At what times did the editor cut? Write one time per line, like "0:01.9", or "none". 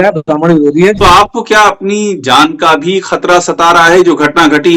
0:01.0